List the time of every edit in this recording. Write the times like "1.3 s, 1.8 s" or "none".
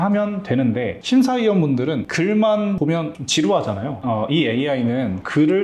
0.9 s, 2.1 s, 3.0 s, 4.0 s